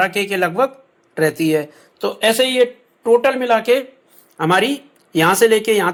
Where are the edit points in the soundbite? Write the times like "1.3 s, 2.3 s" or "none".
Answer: none